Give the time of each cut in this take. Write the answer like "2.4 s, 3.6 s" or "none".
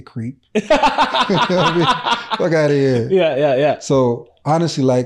none